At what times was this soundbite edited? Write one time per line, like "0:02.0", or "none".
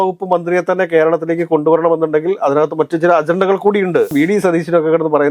0:04.1